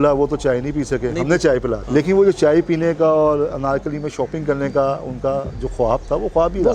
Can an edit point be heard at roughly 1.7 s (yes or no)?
yes